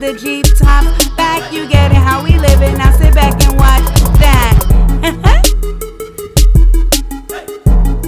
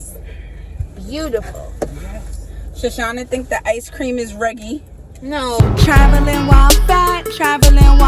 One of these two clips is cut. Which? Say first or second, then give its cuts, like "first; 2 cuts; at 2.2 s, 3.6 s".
second; 1 cut; at 5.6 s